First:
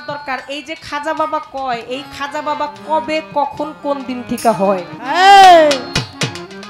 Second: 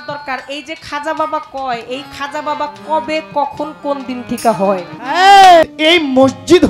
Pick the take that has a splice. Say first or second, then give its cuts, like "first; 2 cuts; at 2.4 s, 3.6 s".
second; 1 cut; at 5.6 s